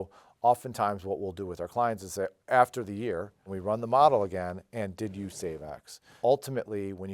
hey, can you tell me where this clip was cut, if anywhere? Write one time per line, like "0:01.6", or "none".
0:03.5
0:06.0